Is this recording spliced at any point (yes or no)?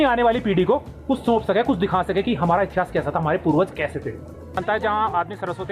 yes